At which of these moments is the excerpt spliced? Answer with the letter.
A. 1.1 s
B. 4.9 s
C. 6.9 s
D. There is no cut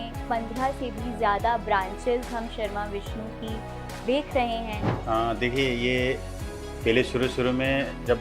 B